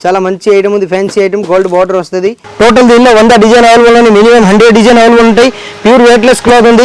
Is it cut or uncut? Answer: cut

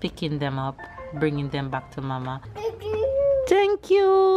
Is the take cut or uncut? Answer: cut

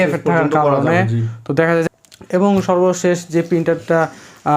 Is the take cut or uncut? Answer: cut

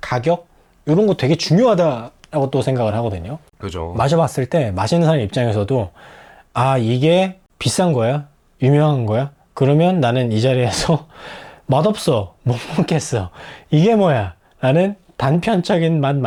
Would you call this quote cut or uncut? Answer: uncut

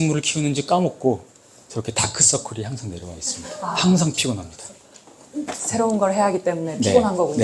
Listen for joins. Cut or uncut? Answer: uncut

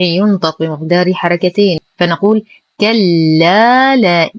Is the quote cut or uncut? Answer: cut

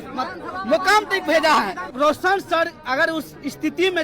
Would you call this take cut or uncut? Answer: cut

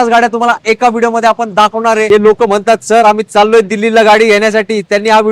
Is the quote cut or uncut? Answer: cut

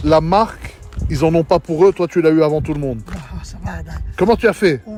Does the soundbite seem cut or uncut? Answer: uncut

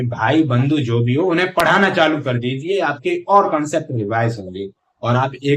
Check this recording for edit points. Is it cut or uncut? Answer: uncut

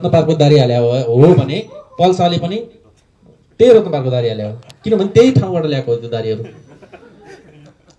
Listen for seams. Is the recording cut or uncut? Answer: uncut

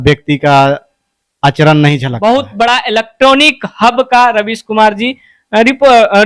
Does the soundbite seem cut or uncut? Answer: cut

